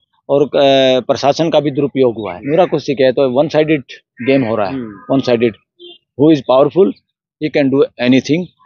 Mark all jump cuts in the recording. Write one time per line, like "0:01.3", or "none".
0:02.3